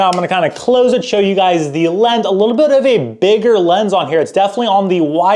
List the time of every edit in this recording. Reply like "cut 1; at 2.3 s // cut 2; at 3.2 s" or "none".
none

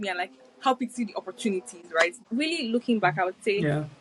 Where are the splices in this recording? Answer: cut 1; at 2.1 s

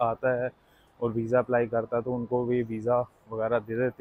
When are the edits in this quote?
none

